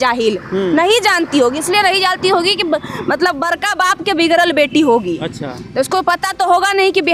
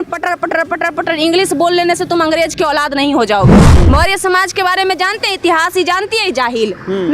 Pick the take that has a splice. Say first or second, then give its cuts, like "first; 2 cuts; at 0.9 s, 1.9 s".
second; 1 cut; at 3.6 s